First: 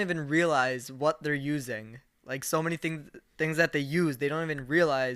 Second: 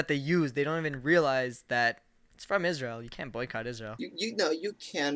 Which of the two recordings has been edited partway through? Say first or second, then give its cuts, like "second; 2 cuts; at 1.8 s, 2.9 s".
second; 1 cut; at 3.9 s